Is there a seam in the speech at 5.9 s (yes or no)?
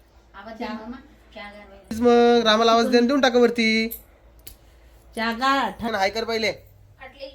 yes